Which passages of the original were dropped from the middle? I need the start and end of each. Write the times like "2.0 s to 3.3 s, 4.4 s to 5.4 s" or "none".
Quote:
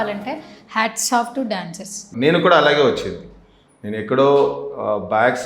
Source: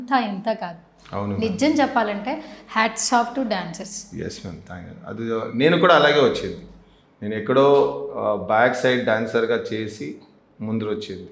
4.1 s to 5.5 s